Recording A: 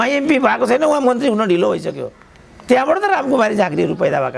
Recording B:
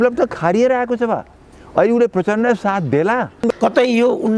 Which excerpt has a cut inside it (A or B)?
B